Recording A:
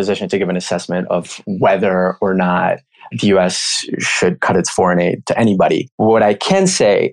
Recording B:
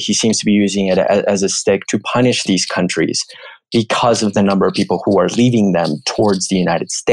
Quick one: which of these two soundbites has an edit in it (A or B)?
A